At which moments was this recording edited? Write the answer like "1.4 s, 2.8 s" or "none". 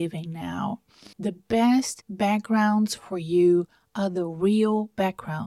none

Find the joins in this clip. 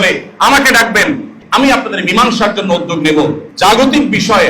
1.4 s, 3.4 s

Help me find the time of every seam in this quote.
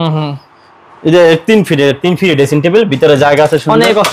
none

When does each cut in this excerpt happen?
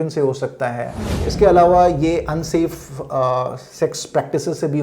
1.2 s

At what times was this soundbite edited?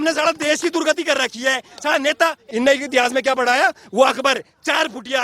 2.4 s

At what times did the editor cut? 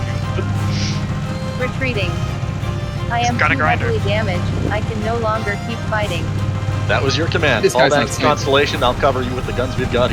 none

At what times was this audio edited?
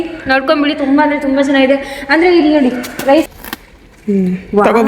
3.3 s

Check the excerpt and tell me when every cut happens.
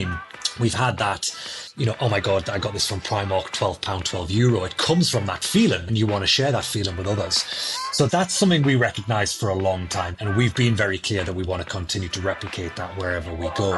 none

